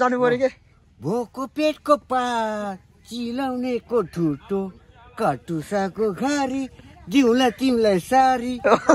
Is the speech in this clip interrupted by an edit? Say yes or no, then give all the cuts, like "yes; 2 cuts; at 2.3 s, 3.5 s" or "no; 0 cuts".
no; 0 cuts